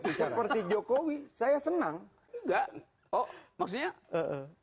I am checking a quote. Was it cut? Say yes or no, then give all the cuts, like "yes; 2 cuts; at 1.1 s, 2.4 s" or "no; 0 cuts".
yes; 1 cut; at 2.2 s